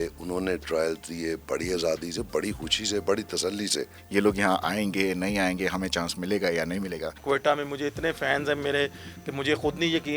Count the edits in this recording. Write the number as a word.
two